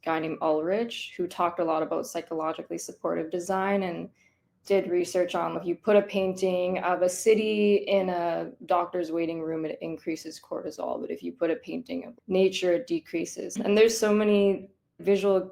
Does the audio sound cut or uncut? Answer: uncut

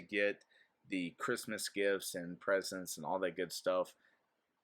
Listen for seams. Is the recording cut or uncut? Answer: uncut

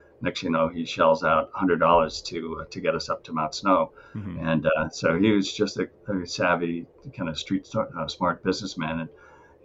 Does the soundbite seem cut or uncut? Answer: uncut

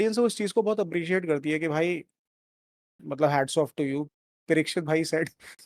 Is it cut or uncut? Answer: cut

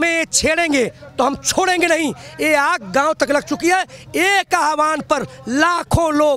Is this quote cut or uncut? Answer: uncut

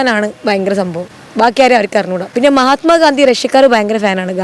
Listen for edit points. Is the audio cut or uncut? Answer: uncut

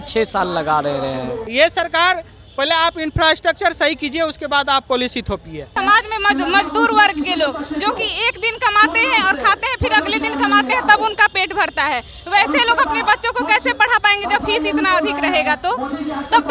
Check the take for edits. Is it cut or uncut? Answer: cut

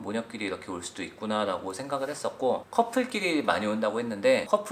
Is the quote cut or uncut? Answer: cut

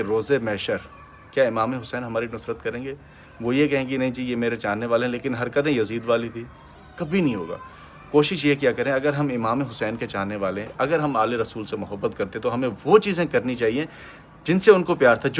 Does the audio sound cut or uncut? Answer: uncut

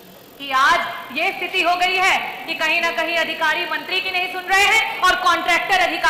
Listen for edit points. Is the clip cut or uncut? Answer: uncut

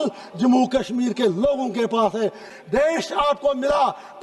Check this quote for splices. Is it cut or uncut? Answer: cut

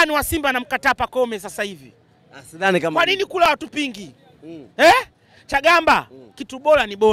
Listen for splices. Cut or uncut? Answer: uncut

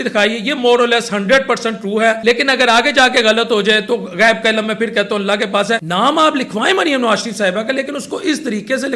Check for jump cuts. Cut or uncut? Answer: cut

